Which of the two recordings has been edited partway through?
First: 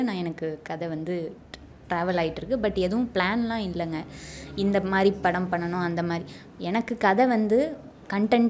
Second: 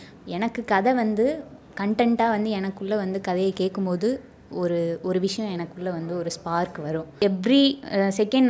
second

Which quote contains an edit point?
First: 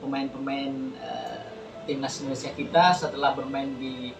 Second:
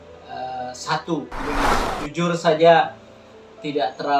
second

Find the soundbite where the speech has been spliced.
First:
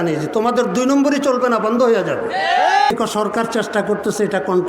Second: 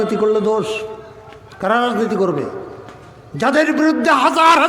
first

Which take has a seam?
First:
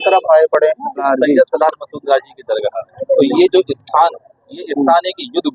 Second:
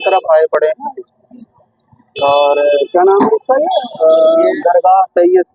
first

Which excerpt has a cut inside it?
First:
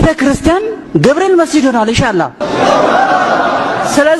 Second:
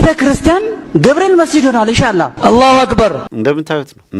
second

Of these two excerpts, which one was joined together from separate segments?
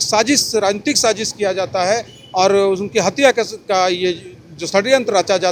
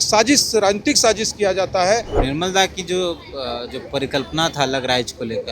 second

